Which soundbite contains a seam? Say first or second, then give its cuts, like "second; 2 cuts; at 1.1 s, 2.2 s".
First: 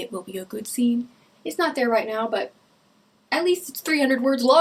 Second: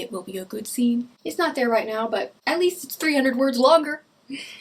second; 2 cuts; at 1.2 s, 2.3 s